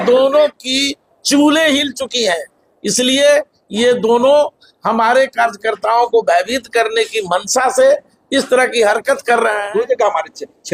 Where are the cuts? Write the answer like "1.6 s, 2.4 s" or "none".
9.7 s